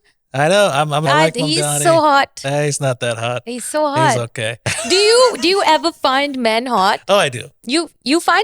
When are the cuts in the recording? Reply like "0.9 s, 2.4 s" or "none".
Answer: 1.0 s, 4.7 s

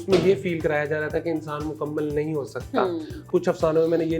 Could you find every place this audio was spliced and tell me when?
3.2 s

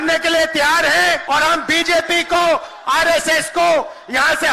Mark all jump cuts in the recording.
1.2 s

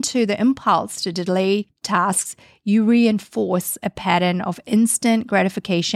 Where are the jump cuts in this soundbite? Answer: 1.8 s

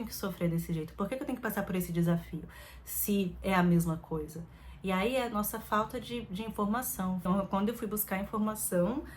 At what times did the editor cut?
7.2 s

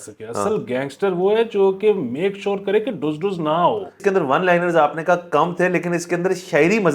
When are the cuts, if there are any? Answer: 4.0 s

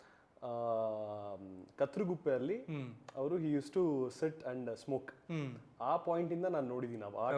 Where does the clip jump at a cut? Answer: none

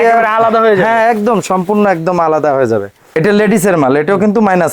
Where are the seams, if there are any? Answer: 3.0 s

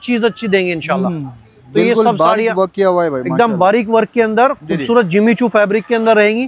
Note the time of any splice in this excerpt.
none

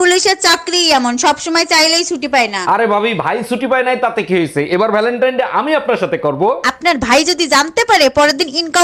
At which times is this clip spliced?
none

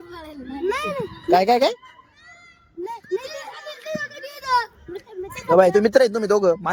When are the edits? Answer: none

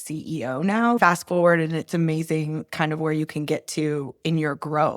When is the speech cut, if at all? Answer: 1.0 s

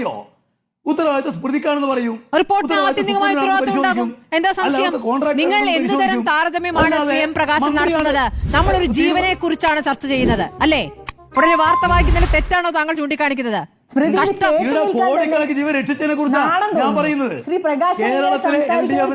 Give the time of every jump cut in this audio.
none

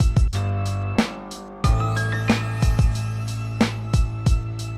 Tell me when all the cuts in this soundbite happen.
1.5 s

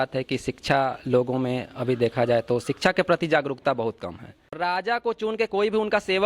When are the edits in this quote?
4.6 s

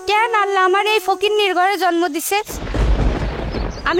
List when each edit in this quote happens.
none

